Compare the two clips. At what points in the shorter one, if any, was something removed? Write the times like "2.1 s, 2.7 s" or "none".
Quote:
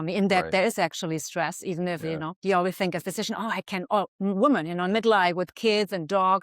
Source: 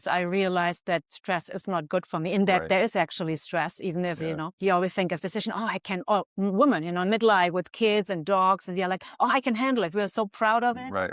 none